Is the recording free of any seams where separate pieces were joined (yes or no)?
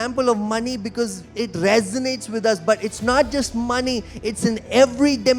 yes